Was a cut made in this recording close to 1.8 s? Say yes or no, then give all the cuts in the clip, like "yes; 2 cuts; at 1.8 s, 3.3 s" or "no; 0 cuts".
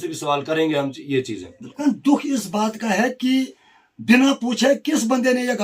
yes; 1 cut; at 1.8 s